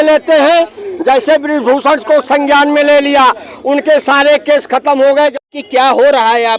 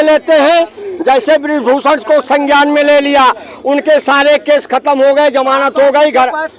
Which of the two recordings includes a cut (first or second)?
first